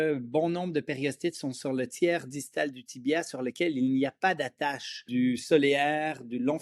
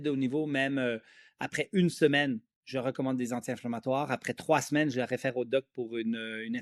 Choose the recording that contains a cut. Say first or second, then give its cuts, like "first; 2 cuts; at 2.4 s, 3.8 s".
first; 1 cut; at 5.0 s